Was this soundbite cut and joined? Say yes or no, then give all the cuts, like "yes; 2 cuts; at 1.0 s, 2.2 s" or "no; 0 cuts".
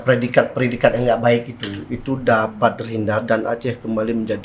no; 0 cuts